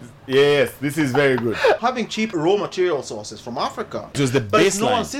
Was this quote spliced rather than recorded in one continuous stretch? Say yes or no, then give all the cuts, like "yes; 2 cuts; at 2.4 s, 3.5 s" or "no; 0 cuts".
yes; 2 cuts; at 1.8 s, 4.2 s